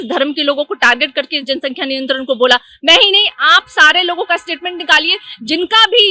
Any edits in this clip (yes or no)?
no